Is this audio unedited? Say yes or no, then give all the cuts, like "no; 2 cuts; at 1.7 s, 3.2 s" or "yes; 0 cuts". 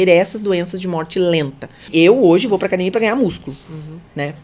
no; 1 cut; at 1.8 s